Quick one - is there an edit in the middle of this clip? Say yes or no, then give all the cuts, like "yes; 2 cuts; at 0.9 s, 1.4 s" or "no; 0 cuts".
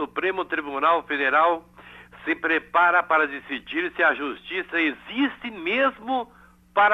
no; 0 cuts